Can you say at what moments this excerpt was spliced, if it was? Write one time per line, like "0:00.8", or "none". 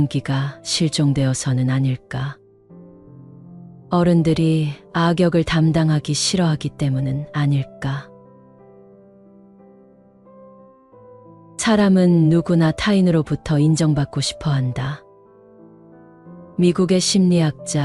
0:08.0
0:11.6
0:15.0
0:16.5

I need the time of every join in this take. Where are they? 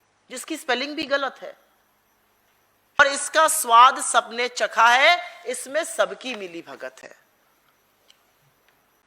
0:03.0

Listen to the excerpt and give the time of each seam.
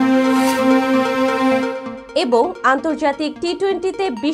0:01.9

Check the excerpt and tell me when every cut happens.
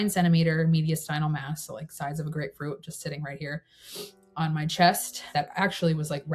0:05.2

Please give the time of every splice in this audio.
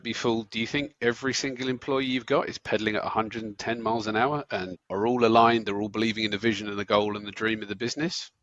0:04.8

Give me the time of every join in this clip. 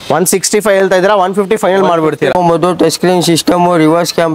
0:02.3

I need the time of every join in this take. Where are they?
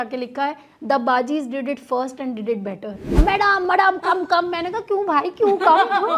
0:03.2

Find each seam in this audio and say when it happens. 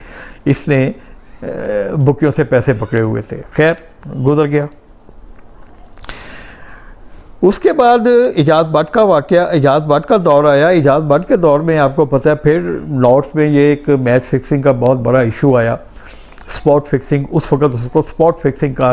none

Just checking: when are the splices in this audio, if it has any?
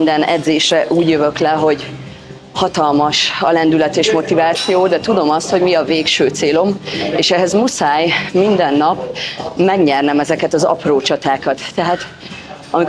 none

